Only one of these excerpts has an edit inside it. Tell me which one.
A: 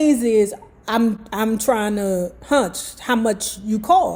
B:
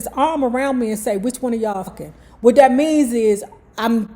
B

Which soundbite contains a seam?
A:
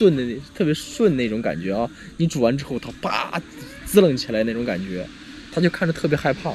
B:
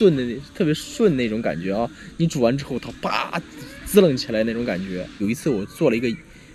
B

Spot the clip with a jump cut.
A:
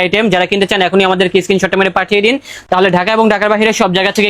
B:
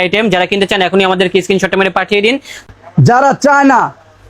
B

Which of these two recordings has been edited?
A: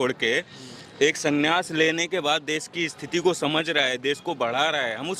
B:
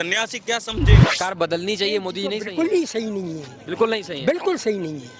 B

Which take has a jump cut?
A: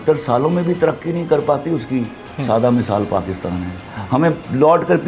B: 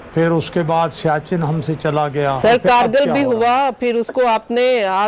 B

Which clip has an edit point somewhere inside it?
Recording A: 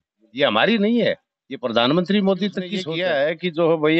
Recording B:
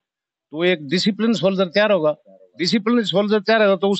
A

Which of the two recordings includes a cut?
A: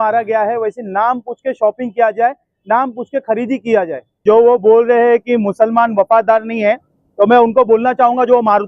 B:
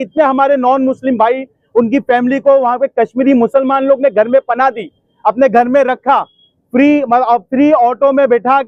A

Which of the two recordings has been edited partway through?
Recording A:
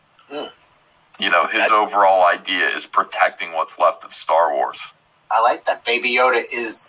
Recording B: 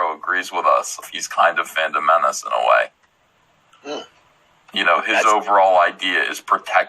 B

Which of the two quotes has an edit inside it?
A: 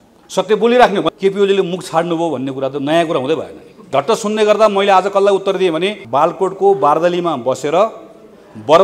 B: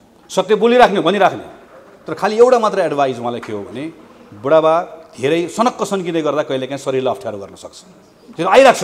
A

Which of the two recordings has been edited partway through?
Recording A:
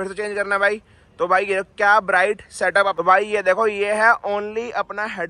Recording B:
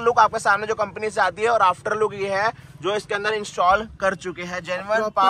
A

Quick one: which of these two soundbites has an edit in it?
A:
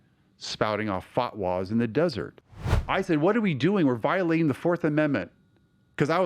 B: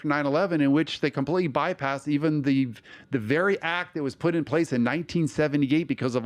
A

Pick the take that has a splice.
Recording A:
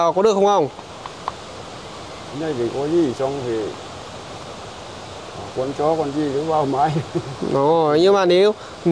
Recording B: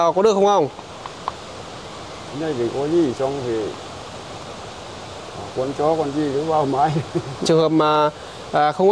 B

